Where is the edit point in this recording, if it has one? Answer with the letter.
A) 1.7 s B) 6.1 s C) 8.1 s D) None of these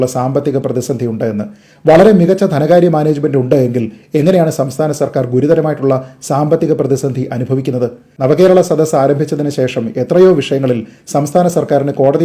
C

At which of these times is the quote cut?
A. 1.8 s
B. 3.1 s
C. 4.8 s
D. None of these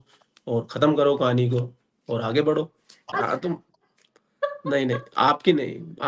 B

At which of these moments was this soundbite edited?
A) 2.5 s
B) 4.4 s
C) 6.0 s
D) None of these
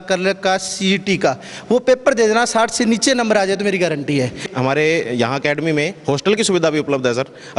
B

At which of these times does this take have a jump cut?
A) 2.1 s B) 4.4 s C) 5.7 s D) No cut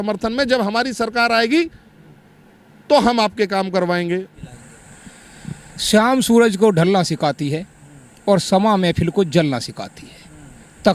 B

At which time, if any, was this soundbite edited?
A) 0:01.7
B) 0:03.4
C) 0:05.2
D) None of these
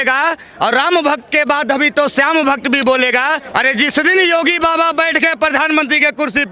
B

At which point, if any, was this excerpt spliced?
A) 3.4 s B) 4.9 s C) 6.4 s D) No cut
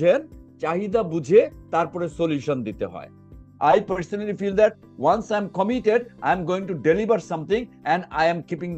A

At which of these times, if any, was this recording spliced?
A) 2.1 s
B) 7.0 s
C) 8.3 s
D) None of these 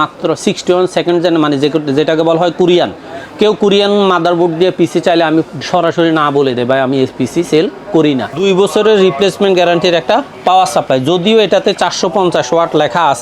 C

